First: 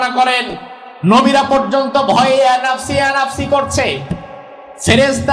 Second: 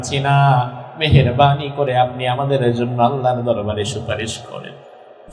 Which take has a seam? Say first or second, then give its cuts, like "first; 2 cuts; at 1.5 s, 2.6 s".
first; 1 cut; at 1.0 s